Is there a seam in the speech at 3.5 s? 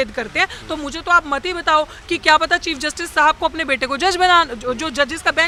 no; 0 cuts

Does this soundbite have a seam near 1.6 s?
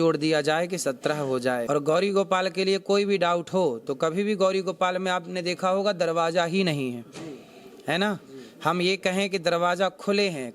yes; 1 cut; at 1.6 s

